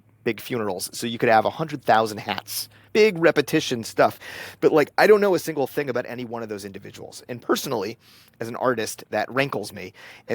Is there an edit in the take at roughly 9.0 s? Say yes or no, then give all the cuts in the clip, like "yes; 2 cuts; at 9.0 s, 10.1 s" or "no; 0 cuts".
no; 1 cut; at 2.8 s